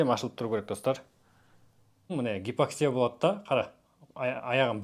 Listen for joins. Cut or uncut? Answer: cut